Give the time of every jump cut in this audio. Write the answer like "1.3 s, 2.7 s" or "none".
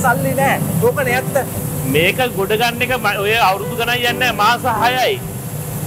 1.6 s